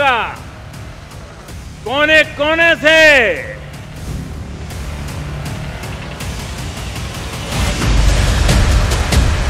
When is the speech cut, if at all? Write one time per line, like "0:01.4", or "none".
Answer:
0:08.1